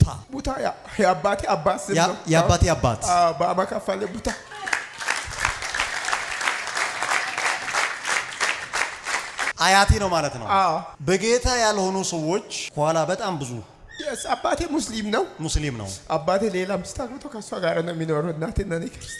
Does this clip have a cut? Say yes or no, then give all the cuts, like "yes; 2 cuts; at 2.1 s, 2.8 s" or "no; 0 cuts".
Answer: yes; 1 cut; at 9.5 s